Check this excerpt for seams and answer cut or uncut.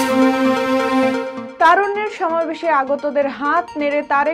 cut